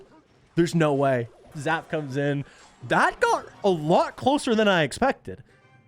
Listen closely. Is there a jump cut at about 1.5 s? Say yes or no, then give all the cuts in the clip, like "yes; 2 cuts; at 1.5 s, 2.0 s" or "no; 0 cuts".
yes; 1 cut; at 1.5 s